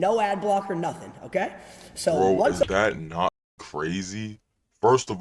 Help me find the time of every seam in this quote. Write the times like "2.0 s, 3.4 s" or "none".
3.4 s